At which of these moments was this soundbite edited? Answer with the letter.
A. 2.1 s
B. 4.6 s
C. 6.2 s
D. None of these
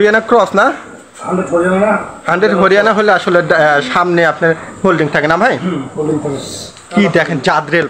D